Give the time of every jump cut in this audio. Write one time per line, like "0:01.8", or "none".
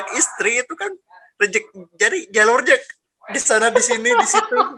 none